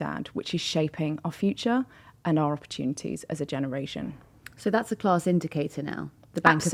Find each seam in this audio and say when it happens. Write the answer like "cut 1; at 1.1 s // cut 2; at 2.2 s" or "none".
none